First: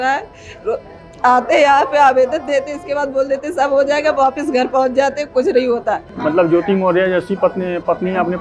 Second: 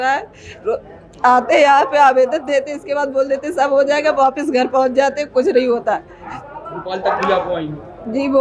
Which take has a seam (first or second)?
first